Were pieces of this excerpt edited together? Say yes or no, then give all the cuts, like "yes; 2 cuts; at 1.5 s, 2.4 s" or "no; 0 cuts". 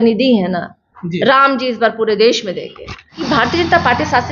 yes; 1 cut; at 3.2 s